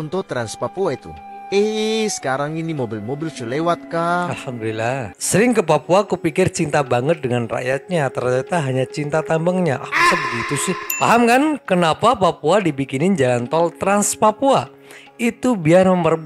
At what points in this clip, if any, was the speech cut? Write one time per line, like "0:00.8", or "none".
0:05.1
0:10.9